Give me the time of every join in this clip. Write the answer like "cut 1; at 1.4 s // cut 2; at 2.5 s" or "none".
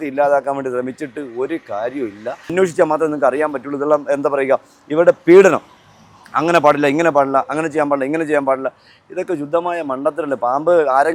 cut 1; at 2.5 s